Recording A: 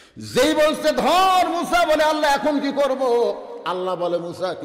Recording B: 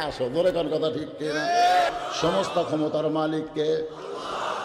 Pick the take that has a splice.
B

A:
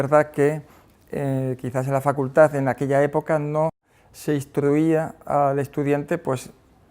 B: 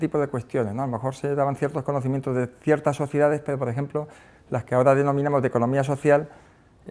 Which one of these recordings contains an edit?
A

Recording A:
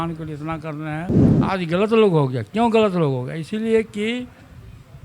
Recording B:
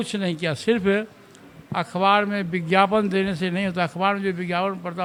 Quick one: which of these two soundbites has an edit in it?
A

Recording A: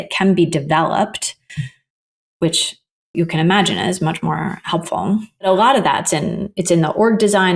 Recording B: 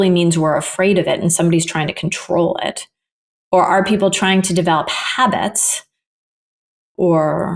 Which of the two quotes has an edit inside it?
A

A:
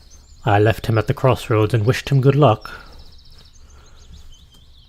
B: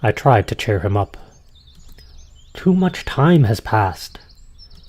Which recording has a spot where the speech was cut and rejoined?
B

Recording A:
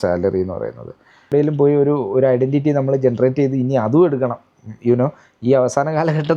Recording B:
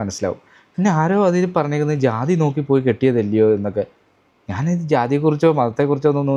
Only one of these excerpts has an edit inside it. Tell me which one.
A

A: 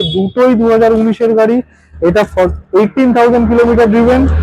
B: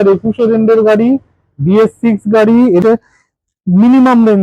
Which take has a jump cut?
B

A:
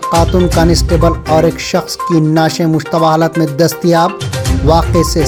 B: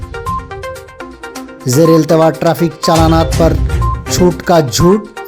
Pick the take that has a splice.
B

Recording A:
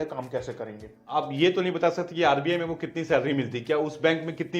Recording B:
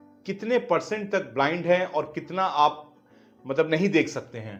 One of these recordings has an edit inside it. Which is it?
A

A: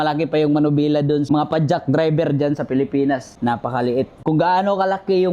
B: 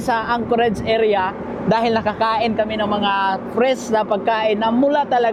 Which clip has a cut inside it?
A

